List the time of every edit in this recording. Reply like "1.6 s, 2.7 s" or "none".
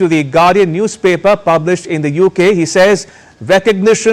none